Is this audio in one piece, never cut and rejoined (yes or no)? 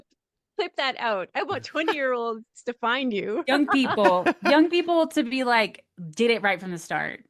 yes